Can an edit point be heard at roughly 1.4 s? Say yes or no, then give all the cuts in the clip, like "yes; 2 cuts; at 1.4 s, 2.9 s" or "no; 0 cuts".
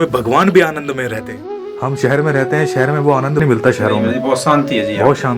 yes; 2 cuts; at 1.4 s, 3.4 s